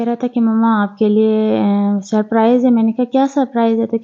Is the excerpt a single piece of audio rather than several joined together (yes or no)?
yes